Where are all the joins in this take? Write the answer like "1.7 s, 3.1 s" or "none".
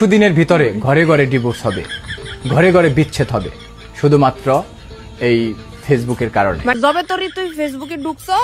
6.8 s